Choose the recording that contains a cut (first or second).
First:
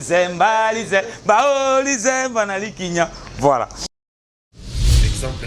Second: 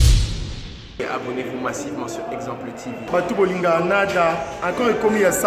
first